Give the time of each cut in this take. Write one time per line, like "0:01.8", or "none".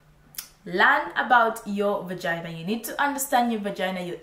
none